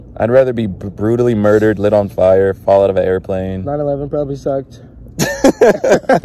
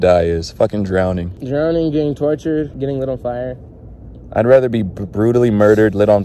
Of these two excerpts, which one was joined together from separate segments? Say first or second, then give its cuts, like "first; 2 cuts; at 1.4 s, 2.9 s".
second; 1 cut; at 2.7 s